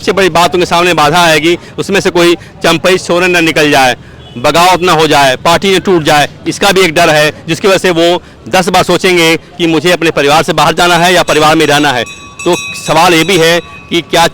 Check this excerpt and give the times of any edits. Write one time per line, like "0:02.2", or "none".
0:01.7